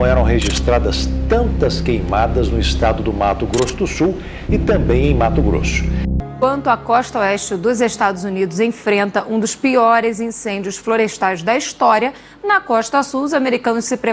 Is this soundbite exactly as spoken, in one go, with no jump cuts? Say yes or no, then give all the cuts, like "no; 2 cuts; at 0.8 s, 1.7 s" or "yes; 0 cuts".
no; 1 cut; at 6.2 s